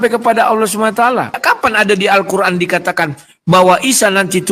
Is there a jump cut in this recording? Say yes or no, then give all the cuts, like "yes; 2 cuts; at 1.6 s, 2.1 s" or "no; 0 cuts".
yes; 1 cut; at 1.4 s